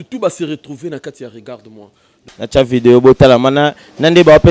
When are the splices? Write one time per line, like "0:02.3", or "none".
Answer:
0:02.1